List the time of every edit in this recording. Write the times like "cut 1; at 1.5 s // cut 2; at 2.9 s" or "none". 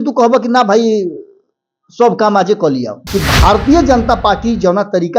cut 1; at 3.0 s